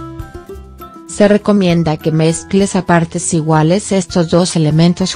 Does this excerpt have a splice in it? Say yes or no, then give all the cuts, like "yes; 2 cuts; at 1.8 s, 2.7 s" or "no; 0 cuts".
yes; 1 cut; at 1.0 s